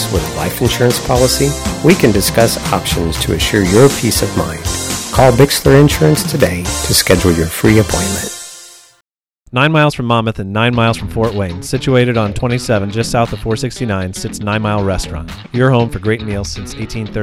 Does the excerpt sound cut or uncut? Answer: cut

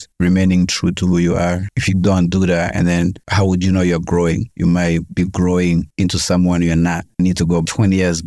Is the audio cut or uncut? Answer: cut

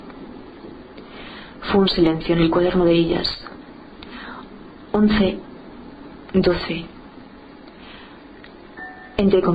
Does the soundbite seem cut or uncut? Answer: cut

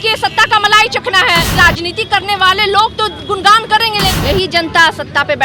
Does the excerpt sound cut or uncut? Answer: cut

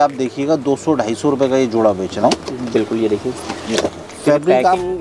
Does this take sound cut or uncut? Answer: cut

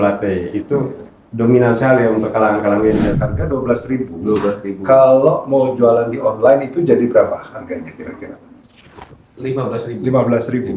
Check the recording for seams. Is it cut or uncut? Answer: cut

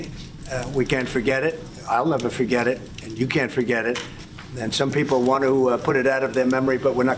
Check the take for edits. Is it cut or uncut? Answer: uncut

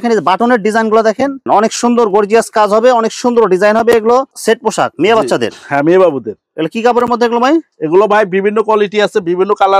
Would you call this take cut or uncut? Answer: cut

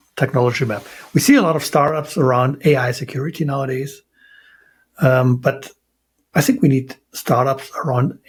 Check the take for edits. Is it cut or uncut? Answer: uncut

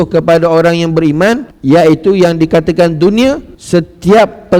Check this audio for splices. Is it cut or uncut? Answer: cut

